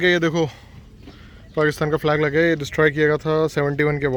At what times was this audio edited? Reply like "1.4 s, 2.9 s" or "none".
none